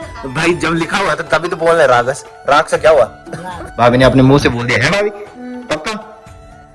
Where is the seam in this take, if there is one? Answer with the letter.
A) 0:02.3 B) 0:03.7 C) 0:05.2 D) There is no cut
B